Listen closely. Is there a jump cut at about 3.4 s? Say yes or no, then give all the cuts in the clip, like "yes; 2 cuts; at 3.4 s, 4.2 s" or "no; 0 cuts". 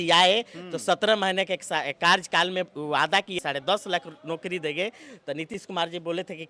yes; 1 cut; at 3.4 s